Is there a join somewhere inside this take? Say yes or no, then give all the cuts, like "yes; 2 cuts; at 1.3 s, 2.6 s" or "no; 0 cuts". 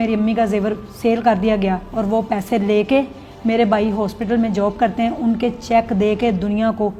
no; 0 cuts